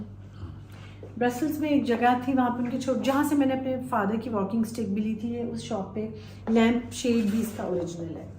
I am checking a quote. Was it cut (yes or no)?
yes